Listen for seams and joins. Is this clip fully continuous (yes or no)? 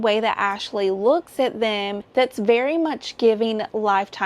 yes